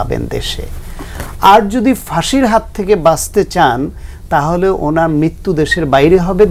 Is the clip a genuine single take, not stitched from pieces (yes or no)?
yes